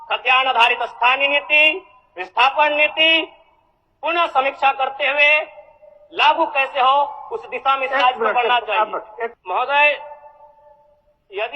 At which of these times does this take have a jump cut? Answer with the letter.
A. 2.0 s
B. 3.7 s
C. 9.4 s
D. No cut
C